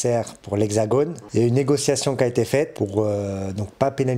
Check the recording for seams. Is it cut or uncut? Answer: cut